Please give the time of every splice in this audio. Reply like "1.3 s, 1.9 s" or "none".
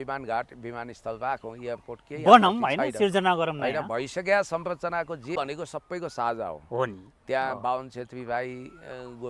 5.4 s